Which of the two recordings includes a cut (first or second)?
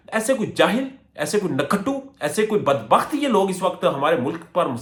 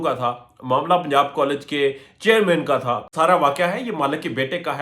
second